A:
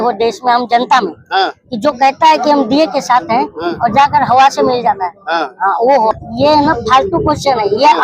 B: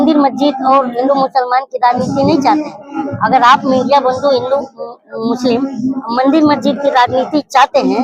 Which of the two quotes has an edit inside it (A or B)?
A